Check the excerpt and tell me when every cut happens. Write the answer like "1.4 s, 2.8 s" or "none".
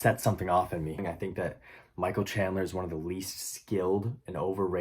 1.0 s